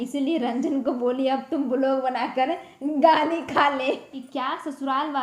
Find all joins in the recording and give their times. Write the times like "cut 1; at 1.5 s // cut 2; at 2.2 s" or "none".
cut 1; at 4.2 s